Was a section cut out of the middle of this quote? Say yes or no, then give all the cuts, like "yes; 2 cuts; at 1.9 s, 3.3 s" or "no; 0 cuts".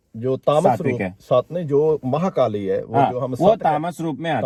no; 0 cuts